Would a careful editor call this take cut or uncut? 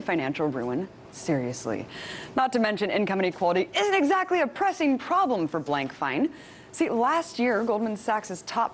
cut